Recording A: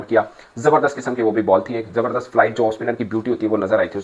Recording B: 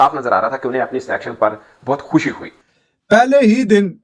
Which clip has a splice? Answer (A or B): B